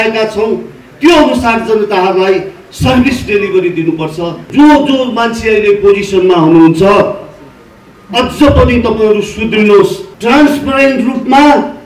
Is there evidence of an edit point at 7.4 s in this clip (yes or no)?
no